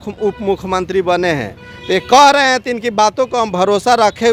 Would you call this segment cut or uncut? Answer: uncut